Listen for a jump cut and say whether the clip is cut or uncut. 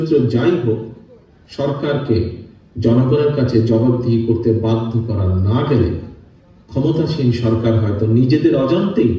uncut